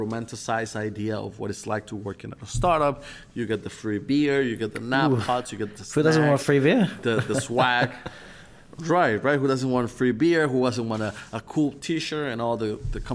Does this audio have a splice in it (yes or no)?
no